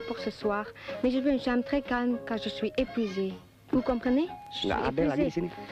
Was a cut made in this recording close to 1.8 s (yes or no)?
no